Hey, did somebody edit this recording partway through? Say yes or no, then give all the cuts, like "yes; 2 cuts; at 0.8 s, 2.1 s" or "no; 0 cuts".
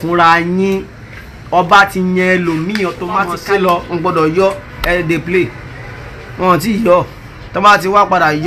yes; 1 cut; at 3.4 s